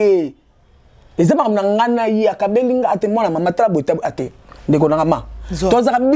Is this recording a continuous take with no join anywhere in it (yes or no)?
yes